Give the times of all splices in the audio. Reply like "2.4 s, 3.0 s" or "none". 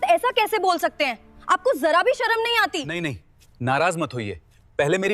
2.9 s